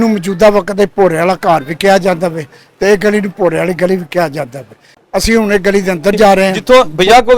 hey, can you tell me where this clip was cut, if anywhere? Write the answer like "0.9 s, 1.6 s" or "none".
4.9 s, 6.6 s